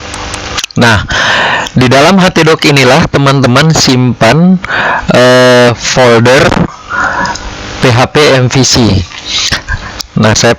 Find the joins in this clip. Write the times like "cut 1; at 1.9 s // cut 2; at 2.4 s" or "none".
none